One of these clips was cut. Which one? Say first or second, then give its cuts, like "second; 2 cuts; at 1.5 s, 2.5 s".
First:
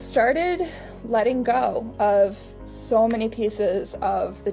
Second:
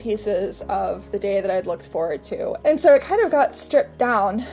second; 1 cut; at 2.6 s